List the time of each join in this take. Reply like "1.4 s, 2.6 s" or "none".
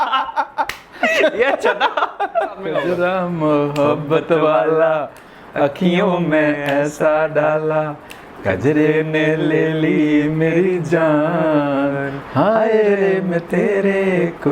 2.7 s